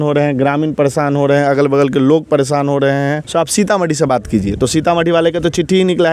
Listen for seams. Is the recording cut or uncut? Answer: cut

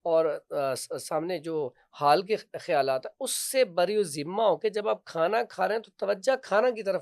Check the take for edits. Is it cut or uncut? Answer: uncut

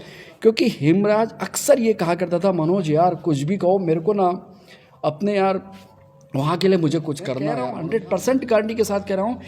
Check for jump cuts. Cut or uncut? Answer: cut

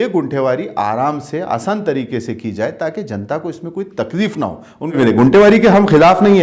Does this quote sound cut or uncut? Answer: cut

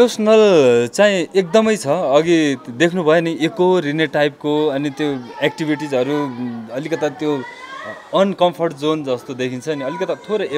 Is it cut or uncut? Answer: uncut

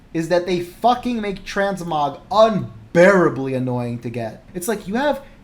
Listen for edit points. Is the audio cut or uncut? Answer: cut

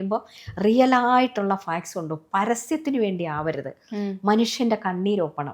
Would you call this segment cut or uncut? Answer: uncut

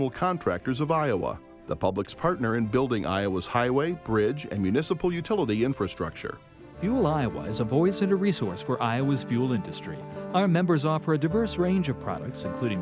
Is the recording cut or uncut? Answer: uncut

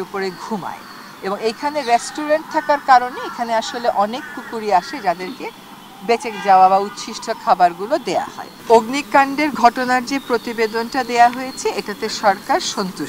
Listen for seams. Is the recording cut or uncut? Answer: cut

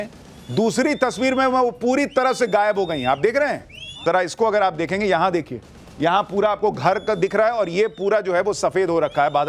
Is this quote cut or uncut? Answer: cut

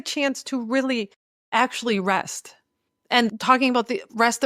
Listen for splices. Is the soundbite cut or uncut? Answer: cut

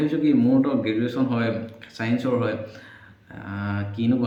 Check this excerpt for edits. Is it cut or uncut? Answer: uncut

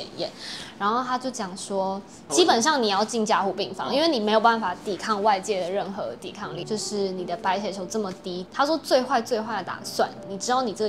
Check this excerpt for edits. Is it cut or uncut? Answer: cut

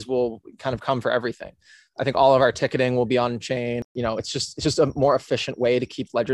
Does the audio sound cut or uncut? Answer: cut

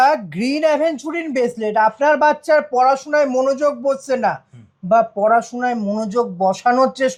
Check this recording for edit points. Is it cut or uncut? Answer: uncut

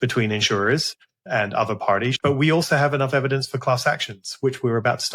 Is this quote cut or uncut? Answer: cut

